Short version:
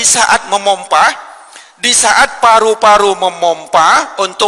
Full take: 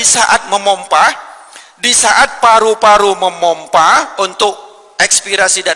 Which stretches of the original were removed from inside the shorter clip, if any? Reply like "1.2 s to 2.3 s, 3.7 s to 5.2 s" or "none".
none